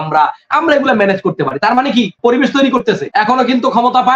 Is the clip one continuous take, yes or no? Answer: no